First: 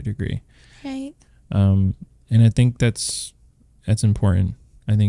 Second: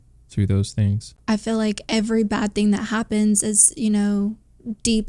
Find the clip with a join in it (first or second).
second